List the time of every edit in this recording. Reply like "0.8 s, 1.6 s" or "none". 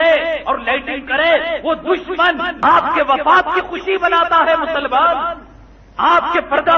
2.5 s